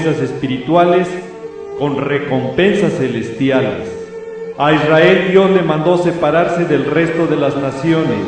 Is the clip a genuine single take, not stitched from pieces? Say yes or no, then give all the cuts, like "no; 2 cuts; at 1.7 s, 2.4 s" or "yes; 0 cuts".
yes; 0 cuts